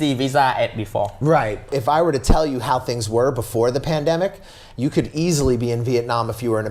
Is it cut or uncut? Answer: cut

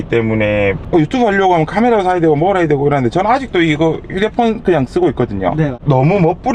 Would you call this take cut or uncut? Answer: uncut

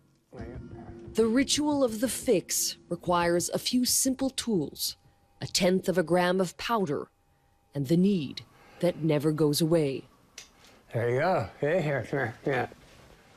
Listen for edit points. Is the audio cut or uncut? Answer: cut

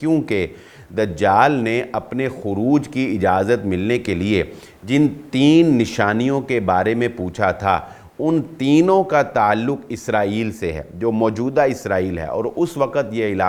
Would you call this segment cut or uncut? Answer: uncut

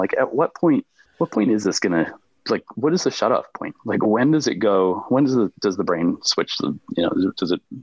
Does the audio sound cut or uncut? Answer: cut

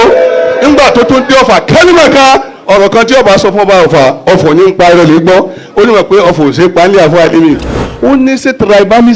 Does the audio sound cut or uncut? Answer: cut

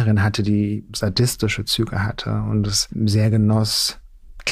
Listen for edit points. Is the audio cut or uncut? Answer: cut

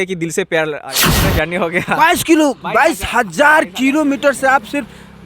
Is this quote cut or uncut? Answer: cut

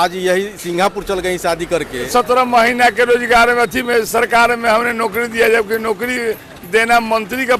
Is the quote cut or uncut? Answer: cut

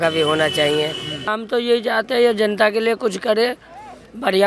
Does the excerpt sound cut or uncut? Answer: cut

